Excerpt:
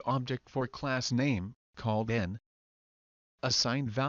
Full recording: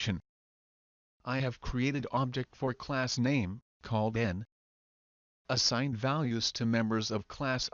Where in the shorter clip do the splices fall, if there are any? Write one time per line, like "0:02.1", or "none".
none